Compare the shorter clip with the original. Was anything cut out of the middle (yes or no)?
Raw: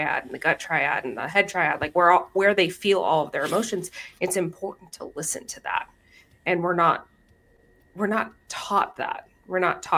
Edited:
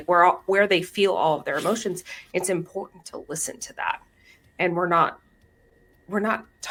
no